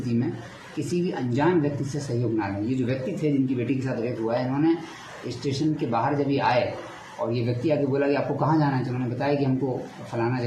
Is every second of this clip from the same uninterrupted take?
yes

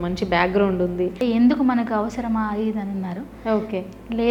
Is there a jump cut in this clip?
yes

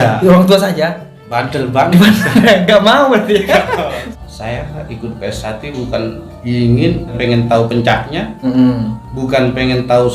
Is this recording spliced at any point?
yes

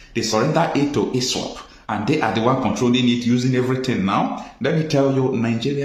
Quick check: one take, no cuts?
yes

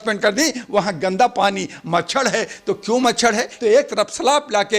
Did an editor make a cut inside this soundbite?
yes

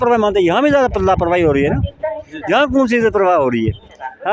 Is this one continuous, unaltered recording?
yes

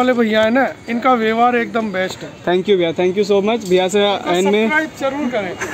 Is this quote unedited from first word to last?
yes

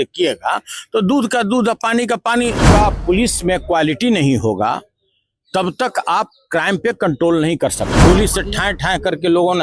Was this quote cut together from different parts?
yes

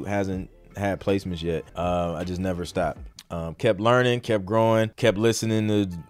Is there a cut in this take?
yes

